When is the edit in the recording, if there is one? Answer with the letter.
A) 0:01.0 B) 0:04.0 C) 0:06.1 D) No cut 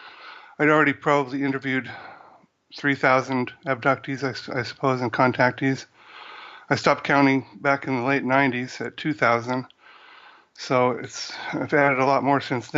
A